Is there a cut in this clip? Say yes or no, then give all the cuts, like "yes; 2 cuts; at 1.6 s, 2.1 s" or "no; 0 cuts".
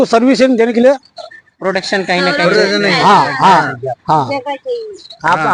no; 0 cuts